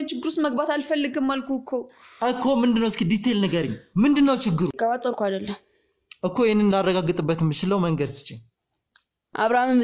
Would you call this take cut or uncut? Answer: cut